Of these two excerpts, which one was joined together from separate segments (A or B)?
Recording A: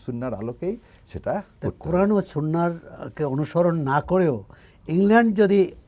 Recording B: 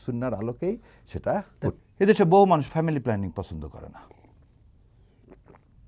B